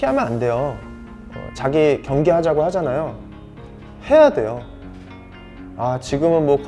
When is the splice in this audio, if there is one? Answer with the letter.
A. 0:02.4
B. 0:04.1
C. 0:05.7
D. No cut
D